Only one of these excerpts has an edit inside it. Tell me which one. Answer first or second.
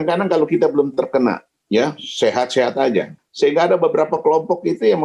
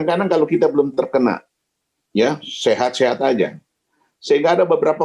first